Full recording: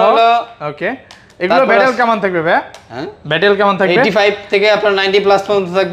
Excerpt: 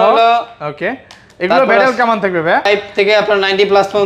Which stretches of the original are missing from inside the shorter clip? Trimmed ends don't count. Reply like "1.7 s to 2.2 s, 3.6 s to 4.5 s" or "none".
2.7 s to 4.2 s